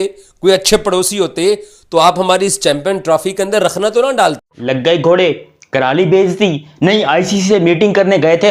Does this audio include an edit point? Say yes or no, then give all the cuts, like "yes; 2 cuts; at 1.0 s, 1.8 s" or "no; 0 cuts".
yes; 1 cut; at 4.5 s